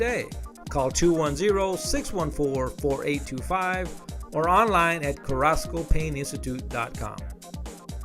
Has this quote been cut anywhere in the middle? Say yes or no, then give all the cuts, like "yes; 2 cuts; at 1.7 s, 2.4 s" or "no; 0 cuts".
yes; 1 cut; at 7.1 s